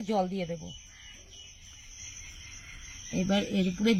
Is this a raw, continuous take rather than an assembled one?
no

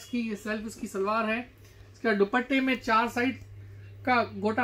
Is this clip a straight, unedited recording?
yes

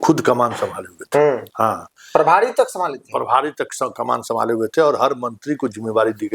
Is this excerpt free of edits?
yes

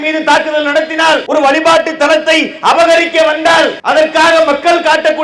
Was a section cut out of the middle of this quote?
yes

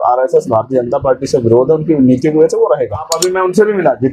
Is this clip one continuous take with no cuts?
no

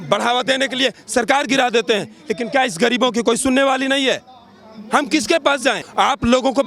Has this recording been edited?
yes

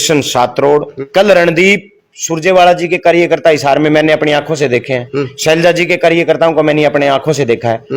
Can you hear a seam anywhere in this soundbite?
yes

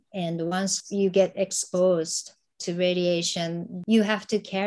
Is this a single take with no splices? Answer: no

